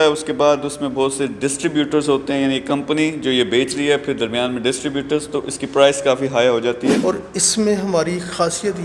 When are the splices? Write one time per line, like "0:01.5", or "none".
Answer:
0:07.0